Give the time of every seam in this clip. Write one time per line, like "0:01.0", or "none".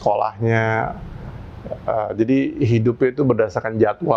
none